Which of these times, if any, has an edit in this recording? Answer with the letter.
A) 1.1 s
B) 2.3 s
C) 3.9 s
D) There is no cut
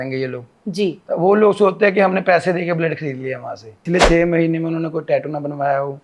C